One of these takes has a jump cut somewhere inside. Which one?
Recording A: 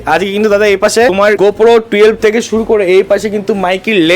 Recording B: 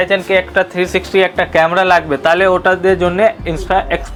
A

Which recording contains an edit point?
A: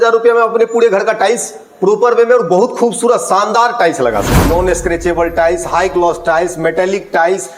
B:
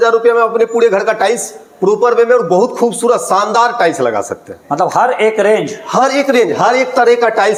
A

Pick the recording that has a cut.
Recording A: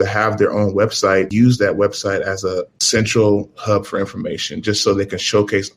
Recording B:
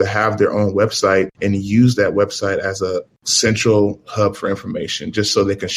A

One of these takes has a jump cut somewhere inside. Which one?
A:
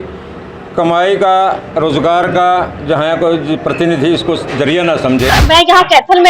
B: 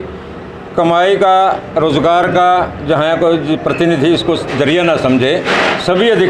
A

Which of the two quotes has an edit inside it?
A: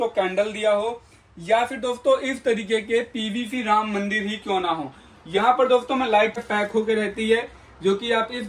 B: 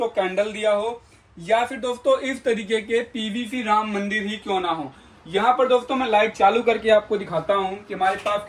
A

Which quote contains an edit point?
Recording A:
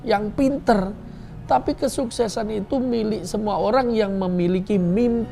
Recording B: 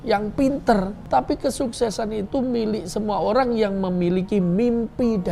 B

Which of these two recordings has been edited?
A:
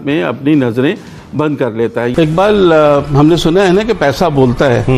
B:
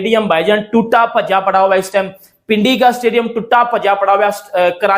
A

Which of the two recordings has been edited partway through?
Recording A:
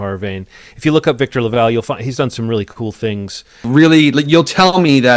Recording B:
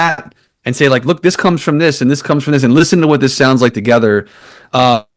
A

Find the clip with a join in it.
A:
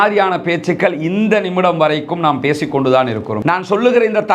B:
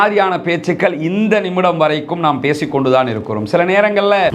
A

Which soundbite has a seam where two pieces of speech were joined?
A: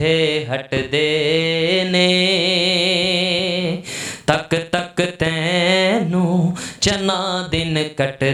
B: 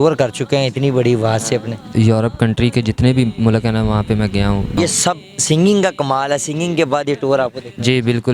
B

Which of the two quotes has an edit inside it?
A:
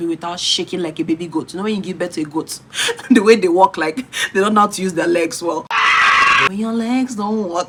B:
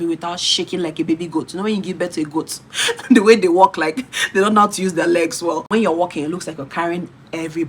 B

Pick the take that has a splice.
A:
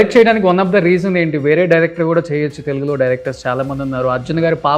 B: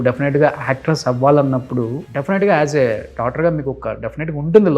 B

